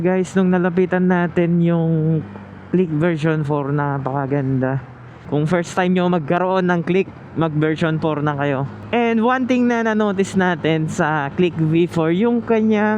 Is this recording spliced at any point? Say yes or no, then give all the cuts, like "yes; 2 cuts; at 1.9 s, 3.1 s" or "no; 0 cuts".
yes; 2 cuts; at 5.1 s, 8.7 s